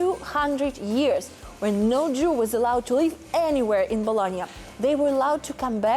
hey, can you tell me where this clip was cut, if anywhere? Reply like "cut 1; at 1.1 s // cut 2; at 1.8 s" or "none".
none